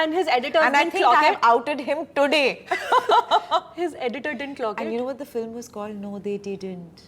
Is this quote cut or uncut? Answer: uncut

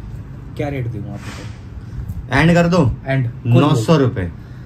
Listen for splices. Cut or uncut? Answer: uncut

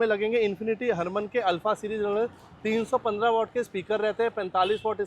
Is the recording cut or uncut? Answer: uncut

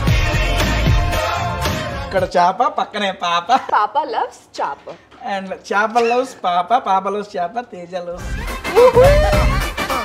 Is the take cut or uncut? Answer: cut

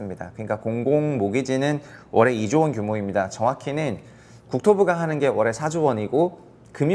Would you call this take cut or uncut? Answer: uncut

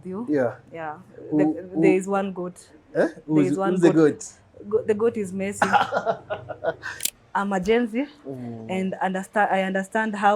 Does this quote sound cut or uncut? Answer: cut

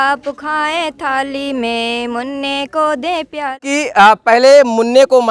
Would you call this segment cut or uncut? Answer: cut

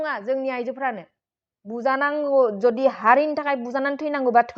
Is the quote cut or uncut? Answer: uncut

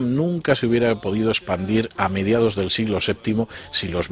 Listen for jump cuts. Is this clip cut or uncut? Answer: cut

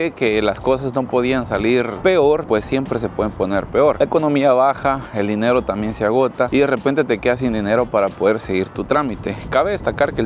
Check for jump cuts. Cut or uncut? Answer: uncut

